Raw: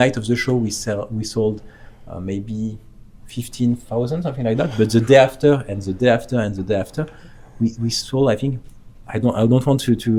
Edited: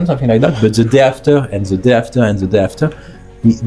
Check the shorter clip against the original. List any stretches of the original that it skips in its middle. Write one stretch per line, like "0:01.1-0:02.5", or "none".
none